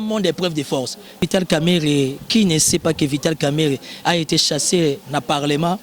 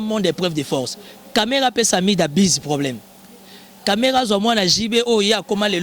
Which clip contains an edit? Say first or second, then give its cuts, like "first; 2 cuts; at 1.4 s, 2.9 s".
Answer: first; 1 cut; at 1.2 s